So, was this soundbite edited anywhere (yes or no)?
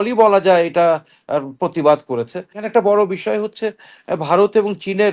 yes